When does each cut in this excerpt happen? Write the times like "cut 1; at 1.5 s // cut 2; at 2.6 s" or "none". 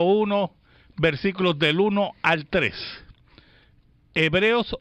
none

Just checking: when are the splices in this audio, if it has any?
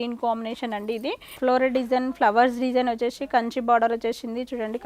cut 1; at 1.3 s

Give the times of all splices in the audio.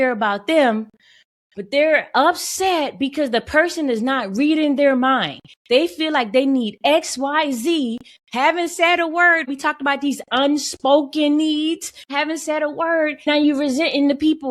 cut 1; at 9.5 s // cut 2; at 12.1 s // cut 3; at 13.3 s

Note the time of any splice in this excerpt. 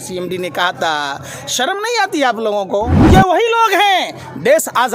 cut 1; at 3.0 s

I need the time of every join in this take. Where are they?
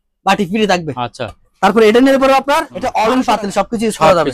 cut 1; at 2.8 s

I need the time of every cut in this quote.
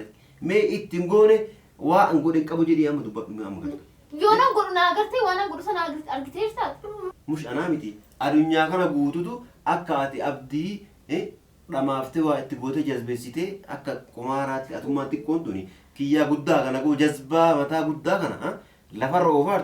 cut 1; at 7.2 s

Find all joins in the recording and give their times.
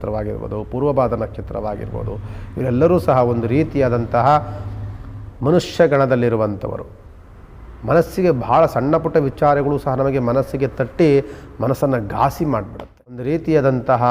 cut 1; at 13.2 s

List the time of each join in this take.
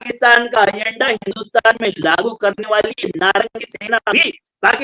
none

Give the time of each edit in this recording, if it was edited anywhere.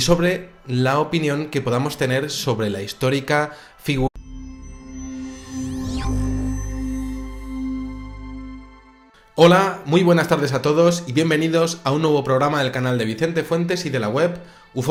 none

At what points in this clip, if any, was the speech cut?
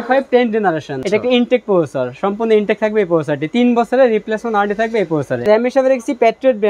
cut 1; at 0.9 s // cut 2; at 5.5 s

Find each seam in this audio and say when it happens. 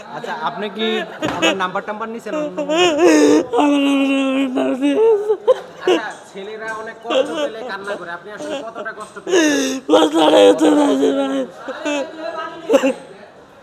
none

